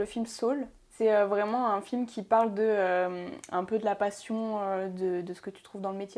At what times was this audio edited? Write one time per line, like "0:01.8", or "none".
0:00.9